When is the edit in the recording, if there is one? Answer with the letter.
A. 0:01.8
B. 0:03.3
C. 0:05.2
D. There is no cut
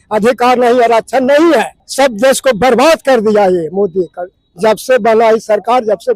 A